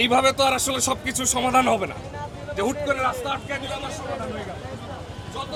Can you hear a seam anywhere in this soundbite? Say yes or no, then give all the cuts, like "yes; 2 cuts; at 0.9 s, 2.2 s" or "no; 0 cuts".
no; 0 cuts